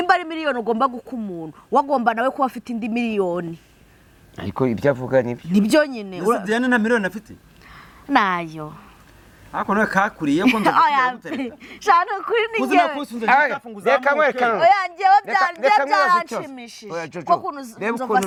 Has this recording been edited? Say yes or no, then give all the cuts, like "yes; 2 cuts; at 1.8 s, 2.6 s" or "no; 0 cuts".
no; 0 cuts